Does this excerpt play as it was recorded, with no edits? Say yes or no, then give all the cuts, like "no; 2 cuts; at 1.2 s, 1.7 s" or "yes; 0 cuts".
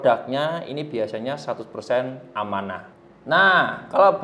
no; 1 cut; at 2.9 s